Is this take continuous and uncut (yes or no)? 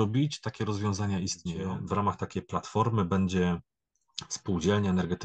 no